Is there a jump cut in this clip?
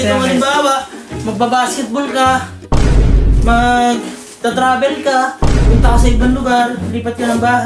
no; 0 cuts

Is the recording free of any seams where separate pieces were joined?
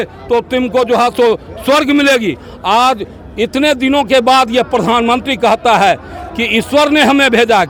yes; 0 cuts

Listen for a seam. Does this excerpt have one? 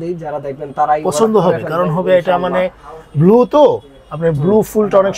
no; 0 cuts

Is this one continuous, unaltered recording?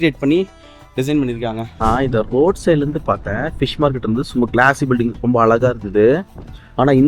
no; 1 cut; at 1.7 s

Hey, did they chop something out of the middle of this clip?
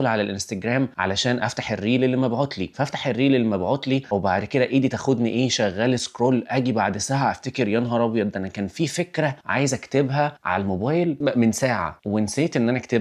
no; 0 cuts

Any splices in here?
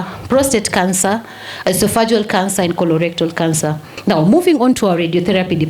yes; 1 cut; at 3.9 s

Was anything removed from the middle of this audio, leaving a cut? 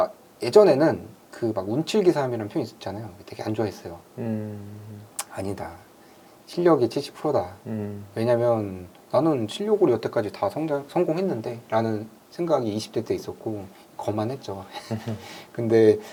no; 0 cuts

